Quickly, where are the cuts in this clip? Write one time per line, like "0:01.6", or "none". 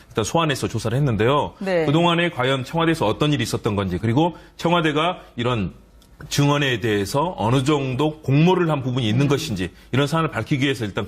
0:07.2